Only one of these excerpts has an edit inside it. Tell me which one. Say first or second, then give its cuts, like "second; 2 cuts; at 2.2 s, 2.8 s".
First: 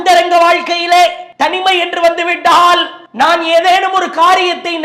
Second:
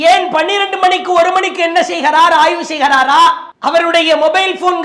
first; 2 cuts; at 1.2 s, 3.0 s